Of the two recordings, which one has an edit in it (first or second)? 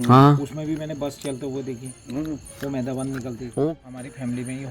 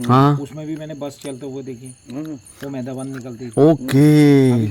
first